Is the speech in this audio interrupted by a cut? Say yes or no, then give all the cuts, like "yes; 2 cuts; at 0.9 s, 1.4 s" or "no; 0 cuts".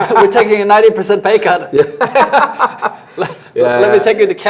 no; 0 cuts